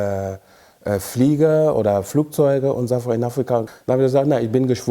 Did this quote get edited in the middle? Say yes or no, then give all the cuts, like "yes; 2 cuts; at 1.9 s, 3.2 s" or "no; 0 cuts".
yes; 1 cut; at 3.7 s